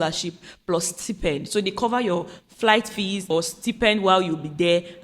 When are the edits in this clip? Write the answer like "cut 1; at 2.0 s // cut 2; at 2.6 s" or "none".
cut 1; at 3.3 s